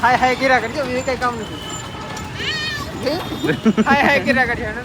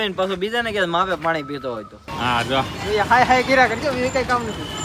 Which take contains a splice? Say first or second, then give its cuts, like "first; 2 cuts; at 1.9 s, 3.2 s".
second; 1 cut; at 2.0 s